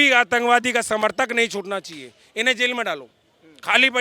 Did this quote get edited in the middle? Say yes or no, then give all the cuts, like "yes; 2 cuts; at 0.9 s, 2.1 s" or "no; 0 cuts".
no; 0 cuts